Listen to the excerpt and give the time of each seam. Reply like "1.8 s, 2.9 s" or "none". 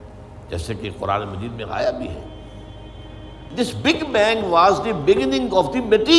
3.5 s